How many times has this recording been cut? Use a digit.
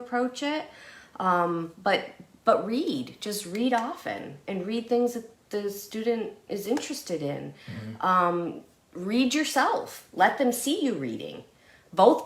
0